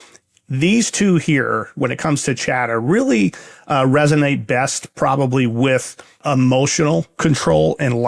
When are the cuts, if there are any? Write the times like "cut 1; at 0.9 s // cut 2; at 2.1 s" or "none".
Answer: cut 1; at 6.2 s